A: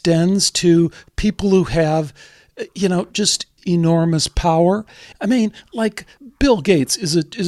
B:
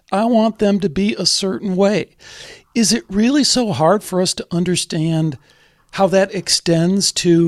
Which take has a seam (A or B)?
A